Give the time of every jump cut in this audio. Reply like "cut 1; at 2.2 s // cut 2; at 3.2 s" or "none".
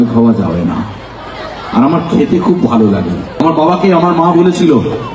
cut 1; at 3.4 s